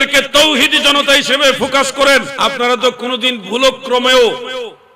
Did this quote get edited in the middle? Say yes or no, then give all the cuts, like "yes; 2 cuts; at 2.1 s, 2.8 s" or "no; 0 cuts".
yes; 1 cut; at 2.3 s